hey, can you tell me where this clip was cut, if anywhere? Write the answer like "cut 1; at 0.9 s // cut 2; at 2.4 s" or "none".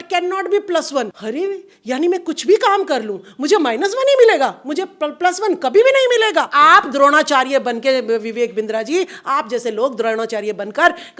cut 1; at 1.2 s // cut 2; at 6.5 s